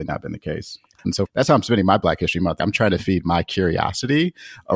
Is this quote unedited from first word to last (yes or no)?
no